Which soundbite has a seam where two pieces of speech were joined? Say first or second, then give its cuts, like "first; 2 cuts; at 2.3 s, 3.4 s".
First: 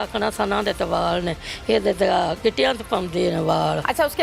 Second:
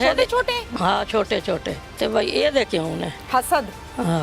second; 2 cuts; at 1.8 s, 3.2 s